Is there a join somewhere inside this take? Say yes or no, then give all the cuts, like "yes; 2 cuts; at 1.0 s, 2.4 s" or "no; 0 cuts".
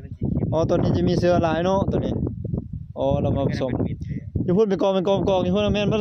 no; 0 cuts